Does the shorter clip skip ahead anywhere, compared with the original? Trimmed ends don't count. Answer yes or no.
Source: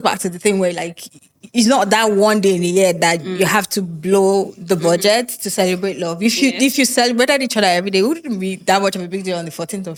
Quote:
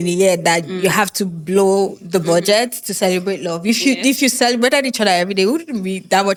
no